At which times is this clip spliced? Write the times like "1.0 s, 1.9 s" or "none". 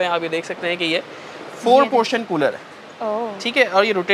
none